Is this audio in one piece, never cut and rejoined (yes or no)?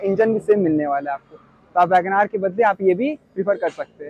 yes